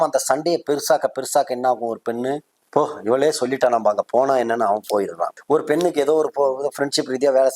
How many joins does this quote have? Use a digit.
2